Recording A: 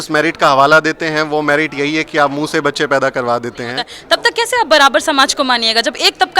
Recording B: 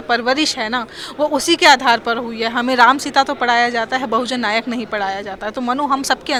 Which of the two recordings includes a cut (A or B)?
A